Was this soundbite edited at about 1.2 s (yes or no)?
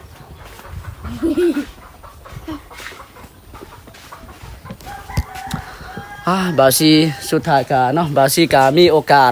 no